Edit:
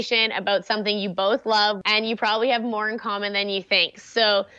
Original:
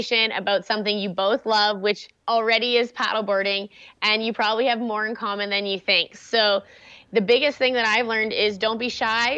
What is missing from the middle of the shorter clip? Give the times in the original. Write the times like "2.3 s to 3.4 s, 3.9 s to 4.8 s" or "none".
1.8 s to 3.9 s